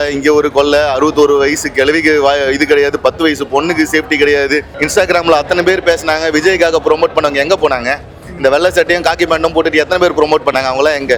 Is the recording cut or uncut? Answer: uncut